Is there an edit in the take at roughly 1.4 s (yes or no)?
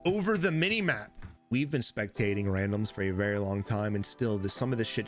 yes